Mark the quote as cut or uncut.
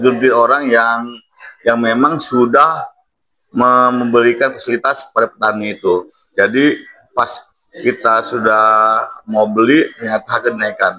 uncut